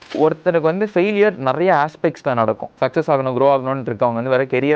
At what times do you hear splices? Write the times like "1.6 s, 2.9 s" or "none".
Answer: none